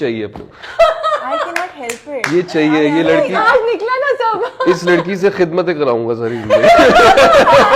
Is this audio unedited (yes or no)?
yes